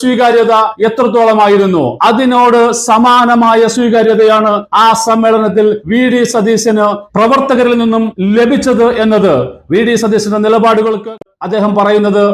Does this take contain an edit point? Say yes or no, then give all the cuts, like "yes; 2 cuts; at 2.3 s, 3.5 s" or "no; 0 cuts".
yes; 1 cut; at 11.2 s